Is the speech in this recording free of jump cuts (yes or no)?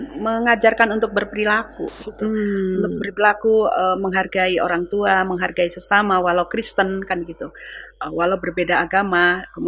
yes